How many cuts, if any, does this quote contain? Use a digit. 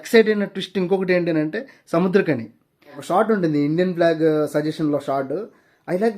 1